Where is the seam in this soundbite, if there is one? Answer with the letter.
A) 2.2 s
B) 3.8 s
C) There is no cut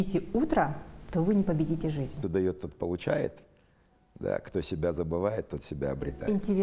A